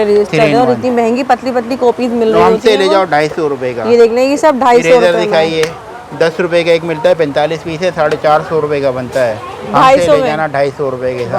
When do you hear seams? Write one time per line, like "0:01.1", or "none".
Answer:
none